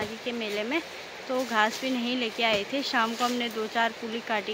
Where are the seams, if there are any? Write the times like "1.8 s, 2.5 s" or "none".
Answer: none